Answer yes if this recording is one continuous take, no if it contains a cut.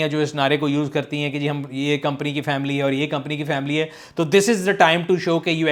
yes